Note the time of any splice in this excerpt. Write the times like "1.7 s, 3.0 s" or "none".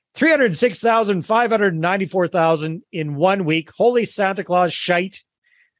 none